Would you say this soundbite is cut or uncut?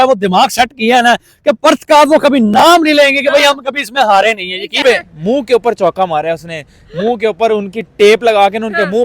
cut